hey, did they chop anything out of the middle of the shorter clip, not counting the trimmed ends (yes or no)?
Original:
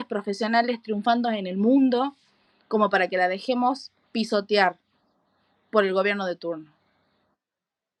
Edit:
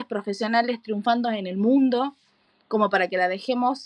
no